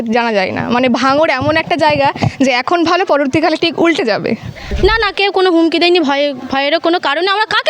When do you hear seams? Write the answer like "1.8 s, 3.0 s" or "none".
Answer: 4.6 s